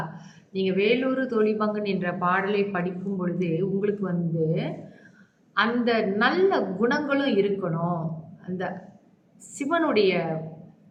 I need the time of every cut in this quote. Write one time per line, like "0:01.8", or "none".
none